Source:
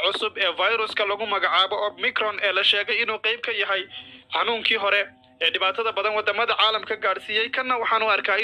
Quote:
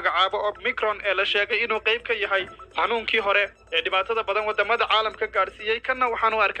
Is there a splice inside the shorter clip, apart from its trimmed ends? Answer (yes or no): yes